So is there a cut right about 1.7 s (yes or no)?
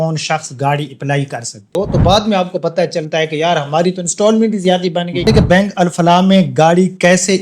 yes